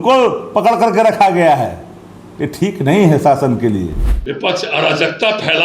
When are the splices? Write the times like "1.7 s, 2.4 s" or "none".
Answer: 4.1 s